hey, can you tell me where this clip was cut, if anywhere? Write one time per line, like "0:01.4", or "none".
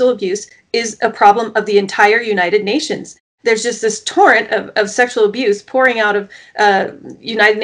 0:03.3